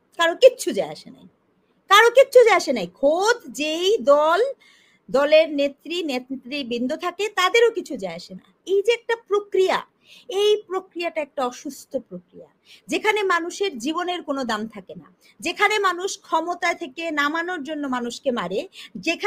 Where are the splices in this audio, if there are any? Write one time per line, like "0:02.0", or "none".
none

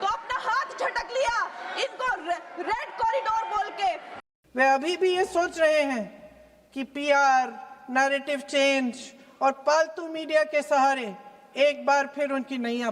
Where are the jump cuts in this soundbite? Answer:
0:04.1

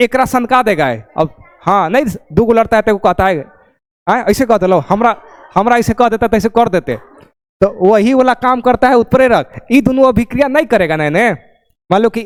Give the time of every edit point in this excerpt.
none

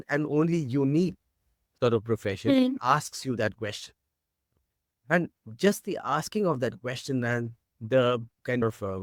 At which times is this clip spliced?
none

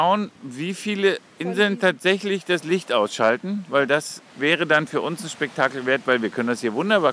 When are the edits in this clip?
0:01.3
0:04.3

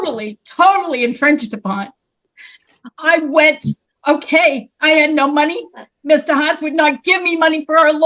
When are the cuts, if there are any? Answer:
none

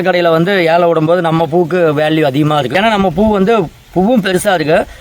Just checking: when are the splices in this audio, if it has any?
0:02.7

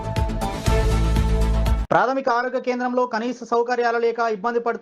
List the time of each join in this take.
0:01.8

